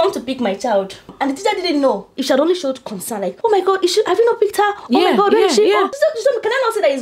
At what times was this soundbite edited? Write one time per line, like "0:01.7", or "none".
0:01.1
0:02.1